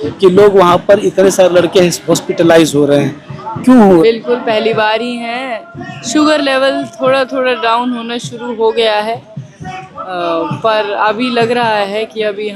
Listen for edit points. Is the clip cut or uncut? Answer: cut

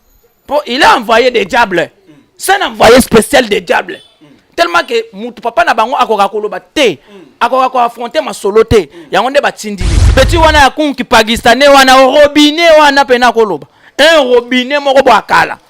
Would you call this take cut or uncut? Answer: cut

